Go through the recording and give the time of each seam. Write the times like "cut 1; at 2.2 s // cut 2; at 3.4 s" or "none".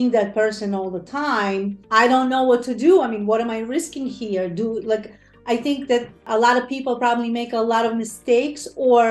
cut 1; at 1.8 s